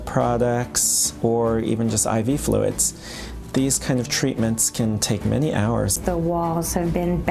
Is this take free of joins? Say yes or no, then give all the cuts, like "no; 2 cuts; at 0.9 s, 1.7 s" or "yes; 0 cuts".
no; 1 cut; at 5.9 s